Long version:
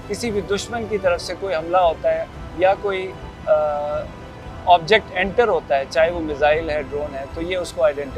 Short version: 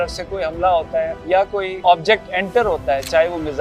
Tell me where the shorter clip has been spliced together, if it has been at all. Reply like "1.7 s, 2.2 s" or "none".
1.3 s